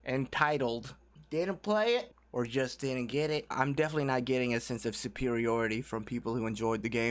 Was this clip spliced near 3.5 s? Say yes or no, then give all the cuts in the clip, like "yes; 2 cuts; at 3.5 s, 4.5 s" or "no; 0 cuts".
yes; 1 cut; at 3.5 s